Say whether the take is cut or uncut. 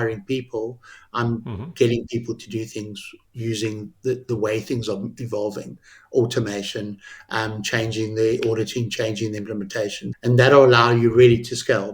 cut